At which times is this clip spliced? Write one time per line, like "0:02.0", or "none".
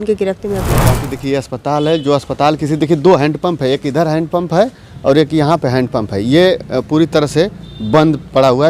0:01.0

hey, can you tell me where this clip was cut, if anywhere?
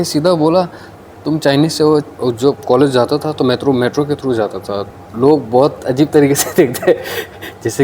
0:02.1
0:04.9

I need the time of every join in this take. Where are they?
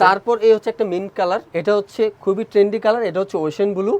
0:01.5

